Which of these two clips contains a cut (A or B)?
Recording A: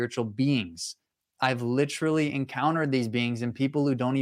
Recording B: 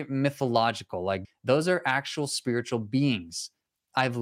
B